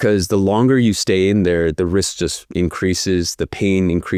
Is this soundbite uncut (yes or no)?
yes